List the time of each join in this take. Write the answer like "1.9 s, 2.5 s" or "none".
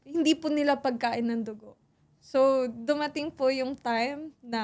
none

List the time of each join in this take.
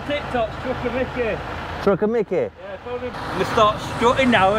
3.1 s

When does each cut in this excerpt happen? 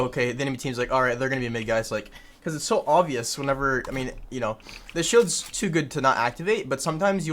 none

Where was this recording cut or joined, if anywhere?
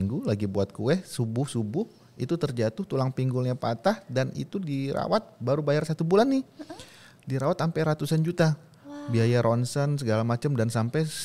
none

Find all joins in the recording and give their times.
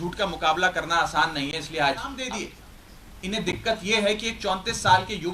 2.2 s

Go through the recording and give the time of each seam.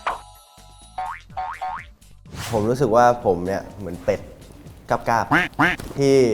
2.5 s

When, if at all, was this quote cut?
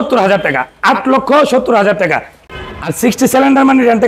2.4 s

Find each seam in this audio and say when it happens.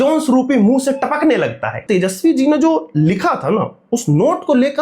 1.8 s

